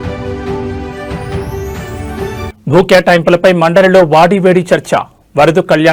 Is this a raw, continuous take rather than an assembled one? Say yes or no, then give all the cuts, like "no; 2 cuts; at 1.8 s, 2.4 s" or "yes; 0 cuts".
yes; 0 cuts